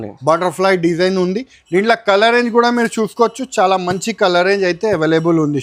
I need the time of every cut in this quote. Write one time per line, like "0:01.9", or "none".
none